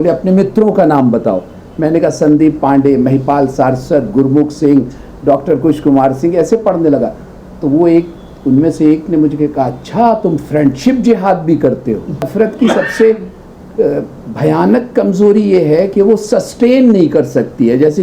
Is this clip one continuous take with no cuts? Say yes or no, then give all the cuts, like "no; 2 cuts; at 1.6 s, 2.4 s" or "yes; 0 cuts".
no; 1 cut; at 12.3 s